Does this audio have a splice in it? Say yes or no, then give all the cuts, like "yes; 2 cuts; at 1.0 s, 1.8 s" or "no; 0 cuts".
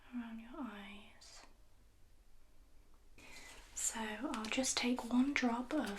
yes; 1 cut; at 3.2 s